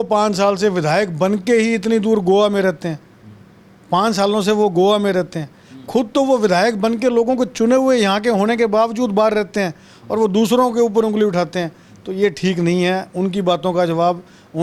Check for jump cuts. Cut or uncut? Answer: uncut